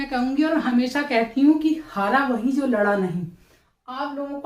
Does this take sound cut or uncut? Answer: uncut